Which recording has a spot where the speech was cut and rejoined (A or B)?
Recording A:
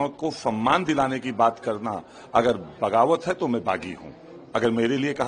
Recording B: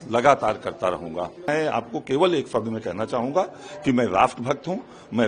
B